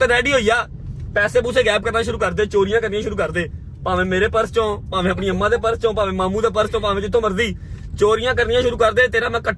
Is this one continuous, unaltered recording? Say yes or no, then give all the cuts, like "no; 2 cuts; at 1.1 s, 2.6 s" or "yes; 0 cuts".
yes; 0 cuts